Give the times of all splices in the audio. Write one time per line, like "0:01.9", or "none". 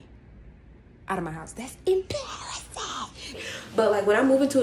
0:03.4